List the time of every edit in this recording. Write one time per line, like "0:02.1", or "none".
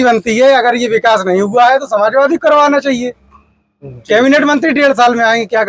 none